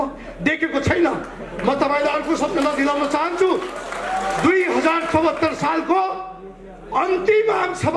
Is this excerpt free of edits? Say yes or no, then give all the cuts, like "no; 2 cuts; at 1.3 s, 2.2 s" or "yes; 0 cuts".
yes; 0 cuts